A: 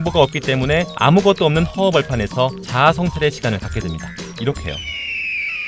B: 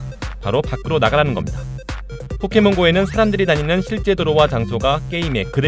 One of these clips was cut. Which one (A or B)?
B